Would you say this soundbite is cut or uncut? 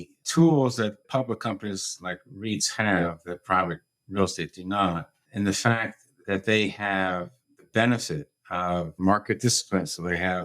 cut